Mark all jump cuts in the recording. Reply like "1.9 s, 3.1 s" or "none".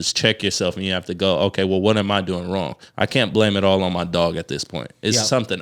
none